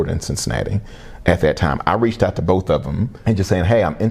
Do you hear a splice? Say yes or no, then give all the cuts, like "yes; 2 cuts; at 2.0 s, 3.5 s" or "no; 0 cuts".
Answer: yes; 1 cut; at 3.1 s